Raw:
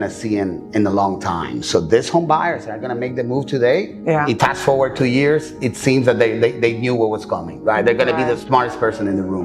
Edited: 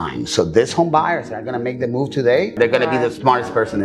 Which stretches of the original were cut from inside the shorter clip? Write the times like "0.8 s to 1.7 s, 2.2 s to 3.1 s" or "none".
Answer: 3.9 s to 7.8 s